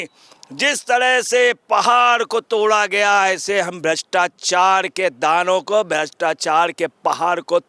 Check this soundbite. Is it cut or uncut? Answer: uncut